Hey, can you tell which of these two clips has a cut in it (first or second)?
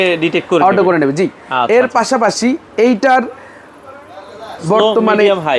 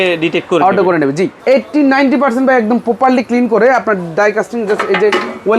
second